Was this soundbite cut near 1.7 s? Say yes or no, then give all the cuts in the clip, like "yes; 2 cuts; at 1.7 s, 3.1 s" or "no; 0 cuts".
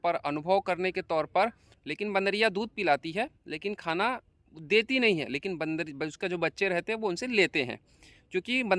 yes; 1 cut; at 1.7 s